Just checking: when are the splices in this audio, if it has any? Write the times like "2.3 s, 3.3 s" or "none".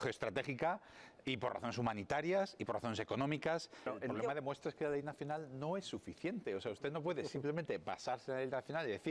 3.9 s